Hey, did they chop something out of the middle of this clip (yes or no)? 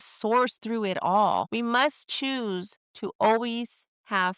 yes